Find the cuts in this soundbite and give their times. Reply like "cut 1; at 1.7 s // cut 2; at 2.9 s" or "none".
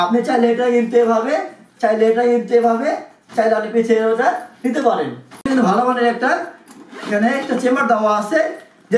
cut 1; at 5.5 s